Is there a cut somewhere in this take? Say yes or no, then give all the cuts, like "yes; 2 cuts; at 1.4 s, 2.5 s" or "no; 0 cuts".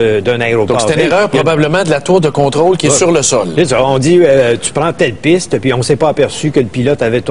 no; 0 cuts